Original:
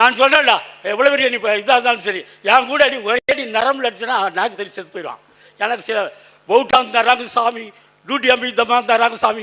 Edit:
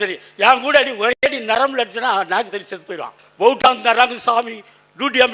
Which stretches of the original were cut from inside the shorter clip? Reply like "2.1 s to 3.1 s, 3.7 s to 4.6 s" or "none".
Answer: 5.2 s to 6.3 s